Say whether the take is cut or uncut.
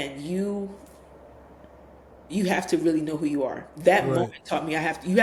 uncut